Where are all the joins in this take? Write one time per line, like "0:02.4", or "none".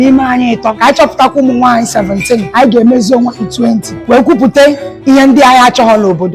0:00.8
0:02.5
0:03.9
0:04.9